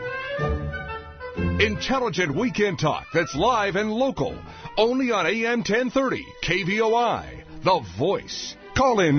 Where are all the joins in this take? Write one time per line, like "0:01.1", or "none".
0:01.6

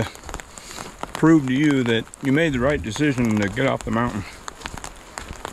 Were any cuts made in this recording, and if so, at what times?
none

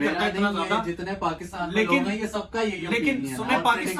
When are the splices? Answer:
none

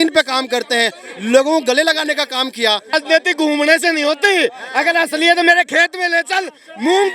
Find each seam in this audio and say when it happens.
0:02.9

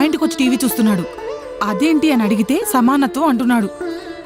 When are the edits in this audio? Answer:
none

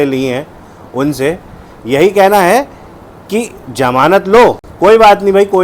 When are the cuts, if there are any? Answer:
none

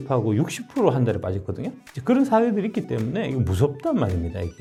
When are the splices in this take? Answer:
none

